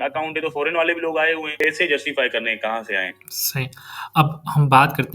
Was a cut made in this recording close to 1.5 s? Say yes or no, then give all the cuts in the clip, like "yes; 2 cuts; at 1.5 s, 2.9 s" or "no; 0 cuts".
yes; 1 cut; at 1.5 s